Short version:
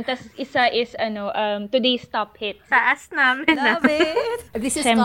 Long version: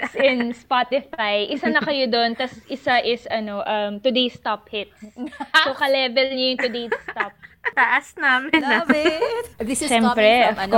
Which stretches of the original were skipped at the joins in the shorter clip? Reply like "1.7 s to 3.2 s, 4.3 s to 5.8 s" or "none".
4.9 s to 7.6 s